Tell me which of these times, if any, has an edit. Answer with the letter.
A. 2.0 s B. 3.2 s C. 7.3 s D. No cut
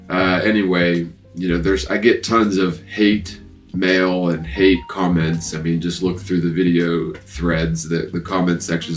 A